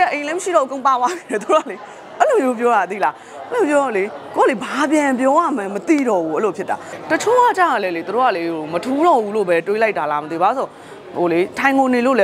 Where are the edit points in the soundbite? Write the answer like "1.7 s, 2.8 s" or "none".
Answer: 6.9 s